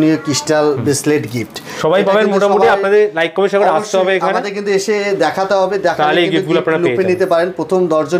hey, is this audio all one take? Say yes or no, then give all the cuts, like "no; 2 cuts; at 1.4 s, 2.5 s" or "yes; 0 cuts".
yes; 0 cuts